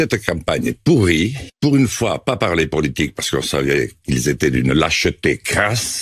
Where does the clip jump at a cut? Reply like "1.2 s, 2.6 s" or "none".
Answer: 1.4 s